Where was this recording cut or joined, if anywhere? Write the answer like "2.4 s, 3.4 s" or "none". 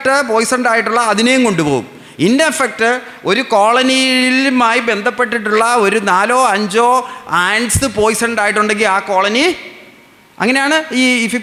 none